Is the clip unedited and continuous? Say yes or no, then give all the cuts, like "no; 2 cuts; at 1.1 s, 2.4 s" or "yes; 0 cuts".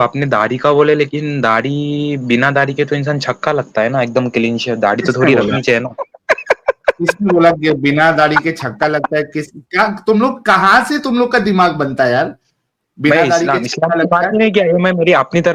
yes; 0 cuts